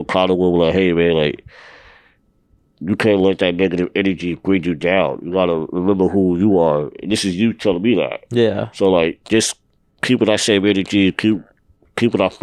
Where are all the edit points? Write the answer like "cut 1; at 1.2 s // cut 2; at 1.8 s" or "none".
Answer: none